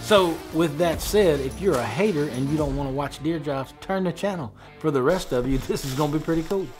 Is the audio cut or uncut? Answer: uncut